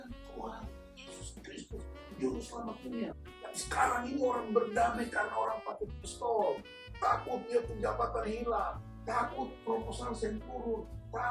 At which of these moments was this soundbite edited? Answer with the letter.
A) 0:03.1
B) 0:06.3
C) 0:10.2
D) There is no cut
A